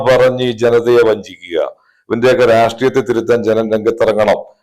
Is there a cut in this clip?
no; 0 cuts

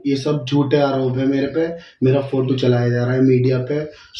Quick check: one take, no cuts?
yes; 0 cuts

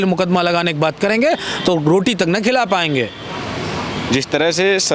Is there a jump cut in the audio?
no; 0 cuts

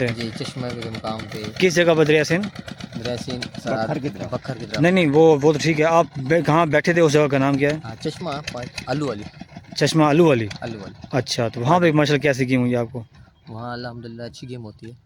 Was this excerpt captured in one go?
yes; 0 cuts

